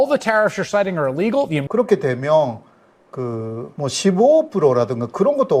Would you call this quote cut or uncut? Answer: cut